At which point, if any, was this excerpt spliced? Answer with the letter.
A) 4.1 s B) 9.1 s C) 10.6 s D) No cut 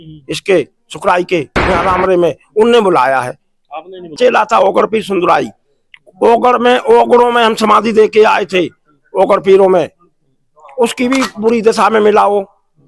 A